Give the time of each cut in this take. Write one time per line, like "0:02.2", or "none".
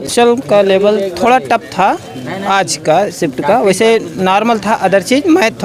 none